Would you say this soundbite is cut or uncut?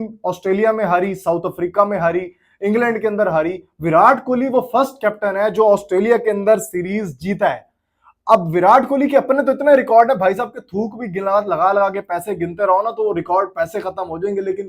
uncut